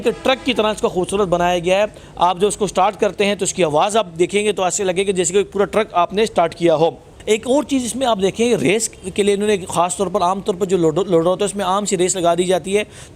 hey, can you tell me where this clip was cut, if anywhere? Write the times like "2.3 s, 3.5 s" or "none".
none